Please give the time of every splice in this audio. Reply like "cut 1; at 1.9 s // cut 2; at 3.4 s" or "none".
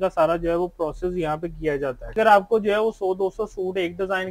cut 1; at 2.1 s

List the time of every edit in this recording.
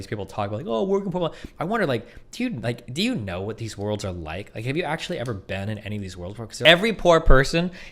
cut 1; at 6.6 s

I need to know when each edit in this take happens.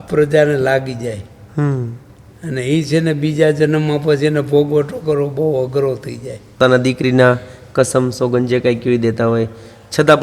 cut 1; at 6.6 s

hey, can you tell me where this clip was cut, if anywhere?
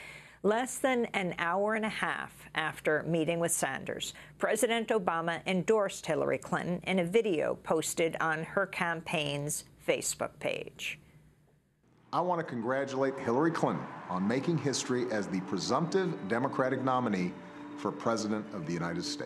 none

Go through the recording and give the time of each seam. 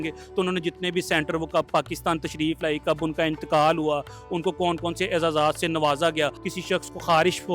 cut 1; at 6.4 s

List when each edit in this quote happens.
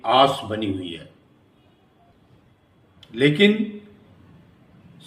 cut 1; at 2.1 s

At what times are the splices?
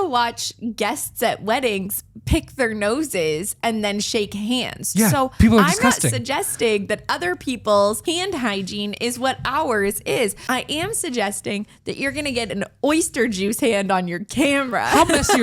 cut 1; at 8.0 s // cut 2; at 10.4 s

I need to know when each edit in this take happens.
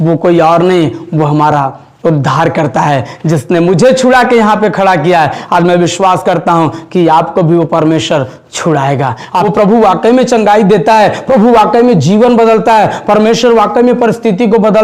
cut 1; at 9.2 s

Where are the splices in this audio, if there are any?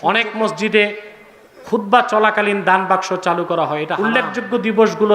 cut 1; at 3.9 s

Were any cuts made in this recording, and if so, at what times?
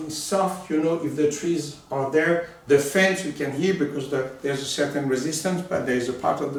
none

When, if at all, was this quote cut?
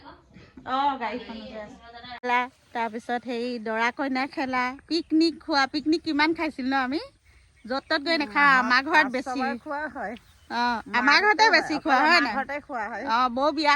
cut 1; at 2.2 s

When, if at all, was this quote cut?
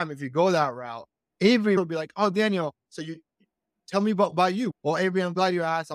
cut 1; at 1.8 s // cut 2; at 4.7 s

